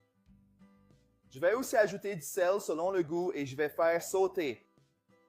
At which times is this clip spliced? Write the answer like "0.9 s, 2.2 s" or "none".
1.2 s